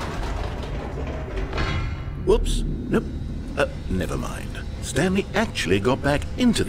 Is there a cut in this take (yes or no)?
no